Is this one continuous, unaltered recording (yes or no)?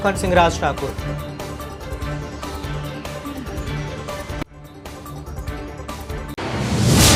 yes